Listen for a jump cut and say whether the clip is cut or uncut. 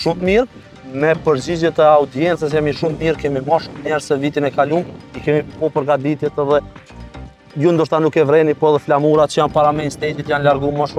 uncut